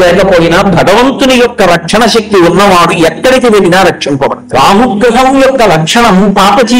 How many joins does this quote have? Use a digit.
1